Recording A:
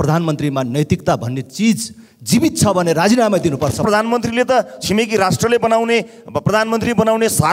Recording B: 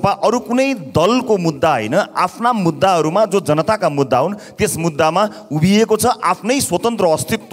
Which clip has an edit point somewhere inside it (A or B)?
A